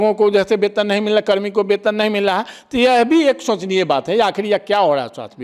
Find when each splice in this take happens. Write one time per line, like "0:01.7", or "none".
none

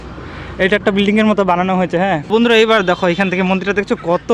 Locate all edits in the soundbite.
0:02.3

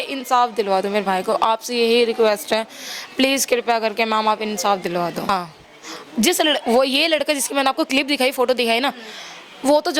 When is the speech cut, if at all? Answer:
0:05.3

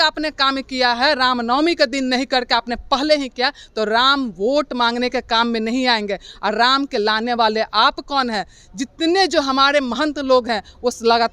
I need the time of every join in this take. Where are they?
none

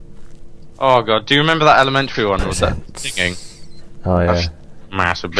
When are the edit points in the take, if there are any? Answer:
0:03.9

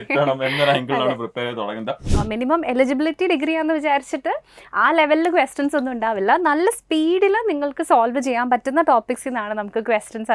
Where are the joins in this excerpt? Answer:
0:02.1

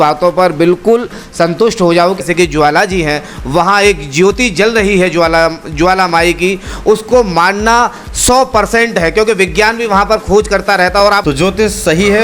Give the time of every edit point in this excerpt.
0:02.2
0:11.2

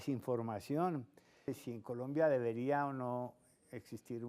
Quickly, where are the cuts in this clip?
0:01.6

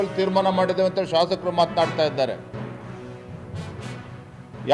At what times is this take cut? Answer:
none

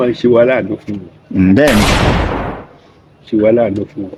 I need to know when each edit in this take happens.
none

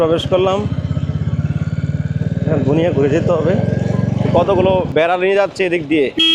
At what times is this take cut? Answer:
0:04.3

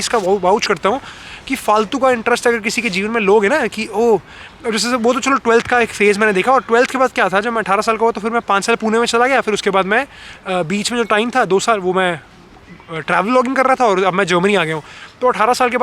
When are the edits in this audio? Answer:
none

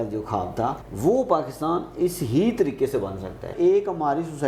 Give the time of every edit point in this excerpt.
0:00.9
0:03.5

